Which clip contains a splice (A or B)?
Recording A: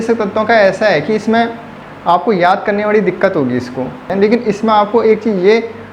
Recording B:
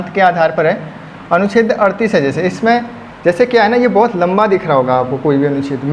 A